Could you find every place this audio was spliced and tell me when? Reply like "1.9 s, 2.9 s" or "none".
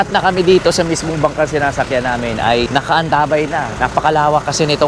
3.7 s